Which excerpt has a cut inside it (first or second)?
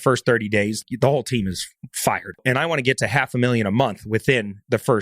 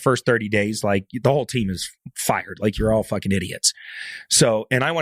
first